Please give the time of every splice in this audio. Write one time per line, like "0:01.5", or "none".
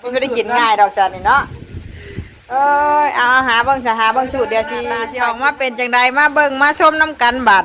0:05.1